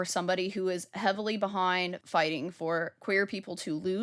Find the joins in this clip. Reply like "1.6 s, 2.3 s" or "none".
2.0 s